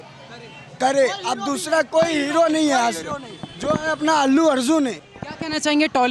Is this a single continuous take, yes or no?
yes